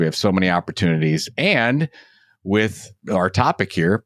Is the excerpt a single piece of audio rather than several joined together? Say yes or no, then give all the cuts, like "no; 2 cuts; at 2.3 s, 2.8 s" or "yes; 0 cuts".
no; 1 cut; at 3.0 s